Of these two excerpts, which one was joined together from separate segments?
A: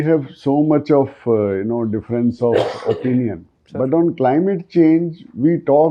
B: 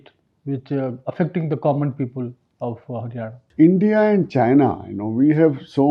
B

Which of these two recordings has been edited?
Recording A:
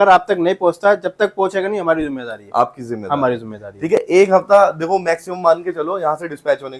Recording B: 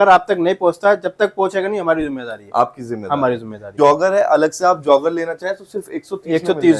B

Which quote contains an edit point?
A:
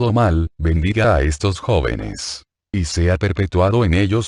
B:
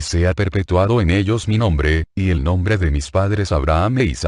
A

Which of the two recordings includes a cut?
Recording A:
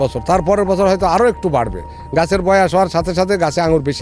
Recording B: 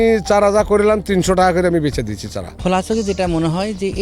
B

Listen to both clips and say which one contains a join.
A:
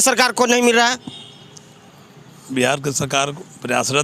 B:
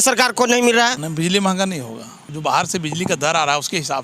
B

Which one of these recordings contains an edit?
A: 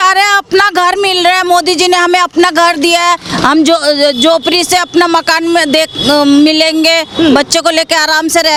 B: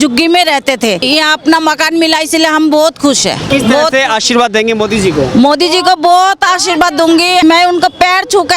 B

